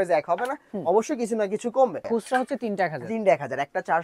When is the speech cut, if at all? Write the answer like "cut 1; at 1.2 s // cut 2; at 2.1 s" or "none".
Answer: cut 1; at 2.0 s